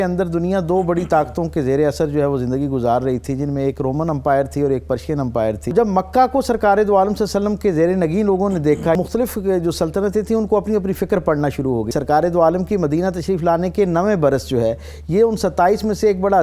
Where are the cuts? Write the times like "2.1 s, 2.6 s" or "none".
5.7 s, 9.0 s, 11.9 s